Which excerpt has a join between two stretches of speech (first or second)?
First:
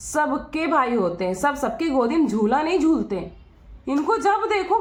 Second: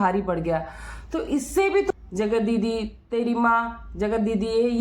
second